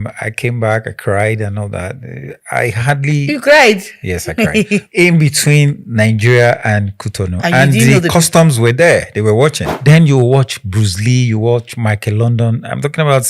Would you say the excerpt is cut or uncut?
cut